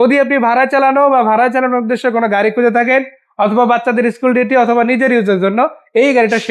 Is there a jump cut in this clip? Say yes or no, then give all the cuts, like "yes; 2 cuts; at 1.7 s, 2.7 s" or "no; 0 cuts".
no; 0 cuts